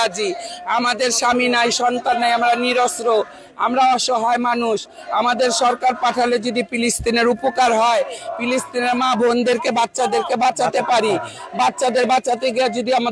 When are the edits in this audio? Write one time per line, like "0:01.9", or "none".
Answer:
none